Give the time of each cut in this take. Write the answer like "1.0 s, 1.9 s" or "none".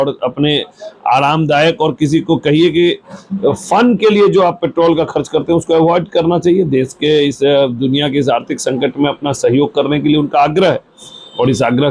none